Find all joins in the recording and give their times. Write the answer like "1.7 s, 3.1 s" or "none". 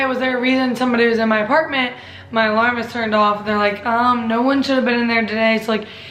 none